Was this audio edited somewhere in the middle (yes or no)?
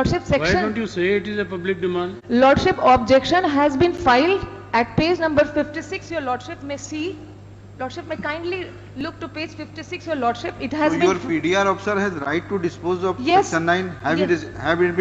no